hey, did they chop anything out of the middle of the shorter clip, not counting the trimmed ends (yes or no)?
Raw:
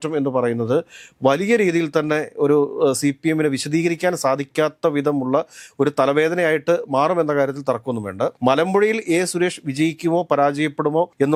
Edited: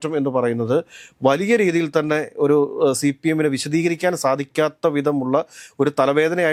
no